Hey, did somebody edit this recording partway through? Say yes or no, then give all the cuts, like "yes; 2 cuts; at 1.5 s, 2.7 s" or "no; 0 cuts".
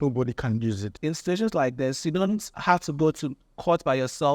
yes; 2 cuts; at 0.9 s, 2.5 s